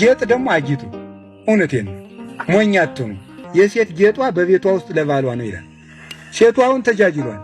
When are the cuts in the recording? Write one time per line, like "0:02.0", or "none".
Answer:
0:03.4